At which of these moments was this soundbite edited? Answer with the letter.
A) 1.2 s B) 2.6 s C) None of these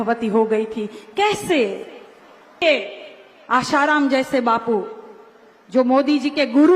B